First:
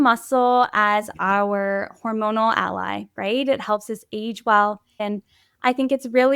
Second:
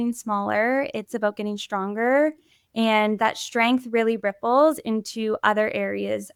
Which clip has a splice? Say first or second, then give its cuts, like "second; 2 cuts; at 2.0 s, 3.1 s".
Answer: first; 1 cut; at 4.9 s